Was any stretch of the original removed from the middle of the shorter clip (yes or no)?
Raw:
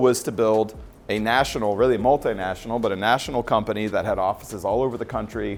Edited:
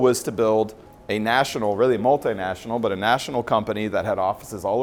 no